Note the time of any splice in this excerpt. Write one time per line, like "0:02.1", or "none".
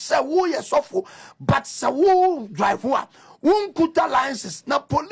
none